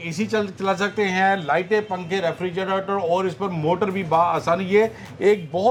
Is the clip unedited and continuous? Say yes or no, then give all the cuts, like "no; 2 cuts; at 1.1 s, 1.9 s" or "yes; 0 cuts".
yes; 0 cuts